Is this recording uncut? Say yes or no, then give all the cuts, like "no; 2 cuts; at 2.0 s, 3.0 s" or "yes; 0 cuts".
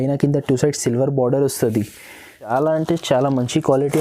no; 1 cut; at 2.5 s